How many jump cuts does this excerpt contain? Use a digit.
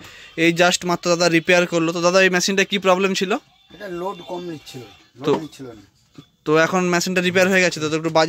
0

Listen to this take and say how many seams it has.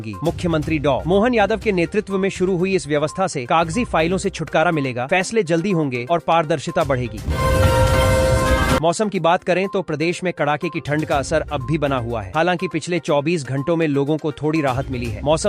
2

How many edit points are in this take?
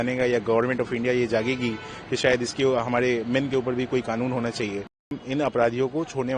1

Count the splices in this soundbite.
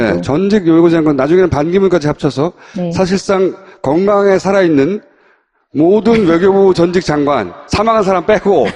0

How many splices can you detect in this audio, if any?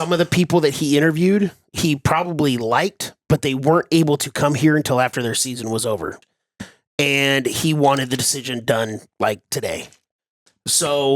2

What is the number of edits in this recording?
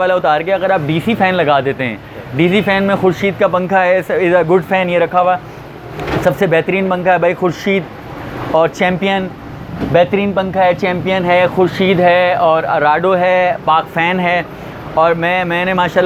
0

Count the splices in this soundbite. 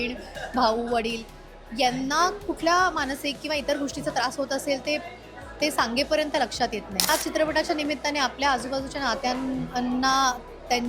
1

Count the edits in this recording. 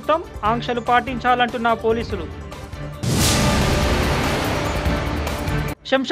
0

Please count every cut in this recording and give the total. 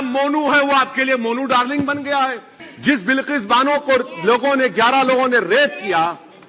1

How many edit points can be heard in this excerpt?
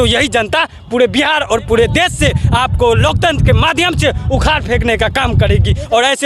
0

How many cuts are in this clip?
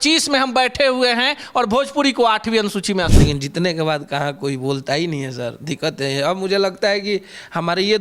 1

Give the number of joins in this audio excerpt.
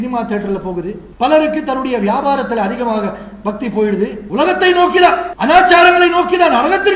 3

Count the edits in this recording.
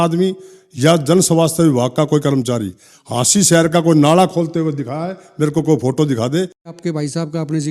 1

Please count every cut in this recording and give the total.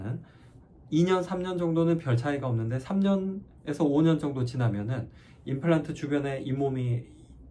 0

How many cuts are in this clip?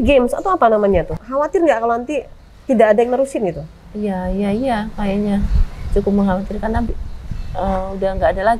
1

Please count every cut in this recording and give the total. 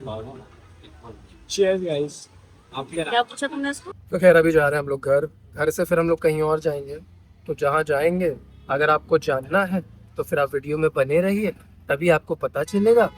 1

